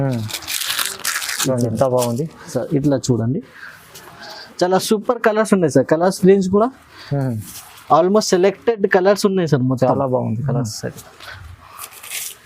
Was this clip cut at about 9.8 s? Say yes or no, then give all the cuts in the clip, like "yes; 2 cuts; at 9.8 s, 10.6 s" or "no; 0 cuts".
no; 1 cut; at 2.5 s